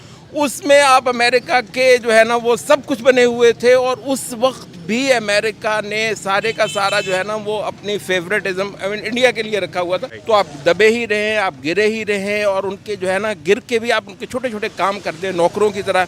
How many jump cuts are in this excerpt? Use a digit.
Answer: 1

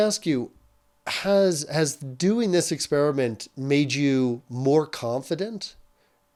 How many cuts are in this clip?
0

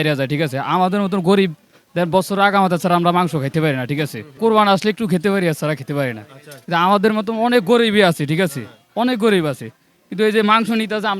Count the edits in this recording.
1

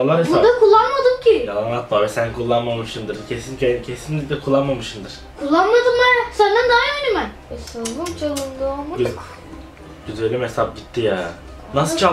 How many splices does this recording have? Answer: 1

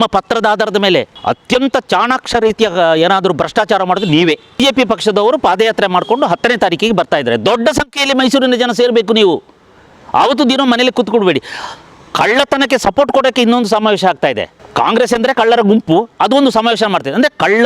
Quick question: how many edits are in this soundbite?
3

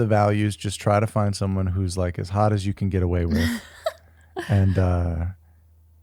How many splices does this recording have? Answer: 0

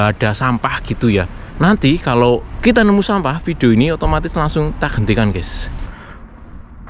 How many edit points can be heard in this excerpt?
3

